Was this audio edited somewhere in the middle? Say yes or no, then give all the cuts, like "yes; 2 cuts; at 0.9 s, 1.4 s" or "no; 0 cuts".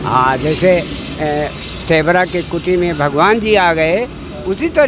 no; 0 cuts